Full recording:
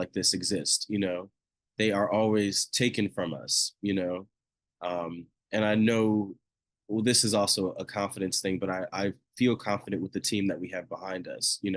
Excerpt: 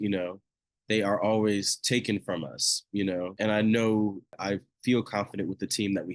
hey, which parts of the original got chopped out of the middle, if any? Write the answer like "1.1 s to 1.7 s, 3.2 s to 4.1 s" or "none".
4.2 s to 5.5 s, 6.5 s to 8.9 s